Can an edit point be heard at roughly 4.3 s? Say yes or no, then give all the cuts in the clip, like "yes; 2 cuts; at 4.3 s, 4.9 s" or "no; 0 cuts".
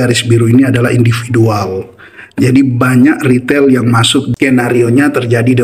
yes; 1 cut; at 4.3 s